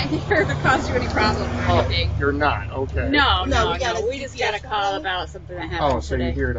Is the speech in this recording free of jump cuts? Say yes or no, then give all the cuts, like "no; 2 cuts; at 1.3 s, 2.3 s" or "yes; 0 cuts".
no; 1 cut; at 2.6 s